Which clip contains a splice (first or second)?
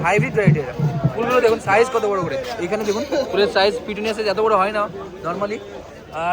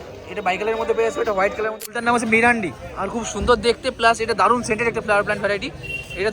second